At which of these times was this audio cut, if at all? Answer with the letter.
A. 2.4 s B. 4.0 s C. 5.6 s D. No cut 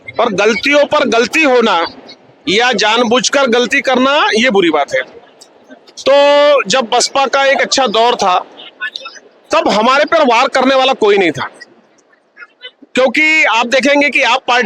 D